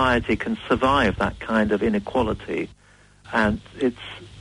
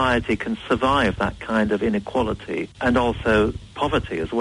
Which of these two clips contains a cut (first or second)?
second